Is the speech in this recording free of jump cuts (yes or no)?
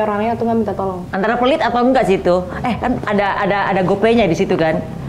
yes